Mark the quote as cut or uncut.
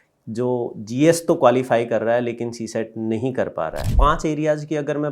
cut